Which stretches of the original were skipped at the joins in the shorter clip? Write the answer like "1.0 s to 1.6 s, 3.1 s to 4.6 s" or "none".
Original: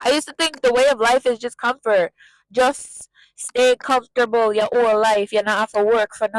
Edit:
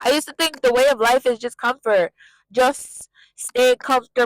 none